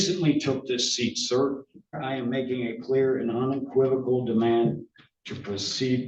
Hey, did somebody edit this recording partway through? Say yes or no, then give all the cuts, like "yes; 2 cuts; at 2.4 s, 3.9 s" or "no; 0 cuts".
yes; 1 cut; at 2.0 s